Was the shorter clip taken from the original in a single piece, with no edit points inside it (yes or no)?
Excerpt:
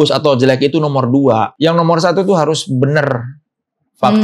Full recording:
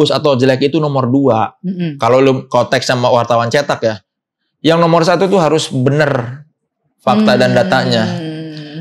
no